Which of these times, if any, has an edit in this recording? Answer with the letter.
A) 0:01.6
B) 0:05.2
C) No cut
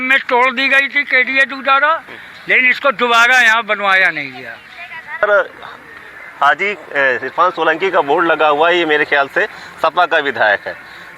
B